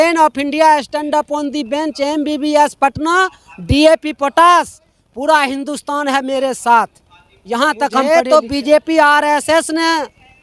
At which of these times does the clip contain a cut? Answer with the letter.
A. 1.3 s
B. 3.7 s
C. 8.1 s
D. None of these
C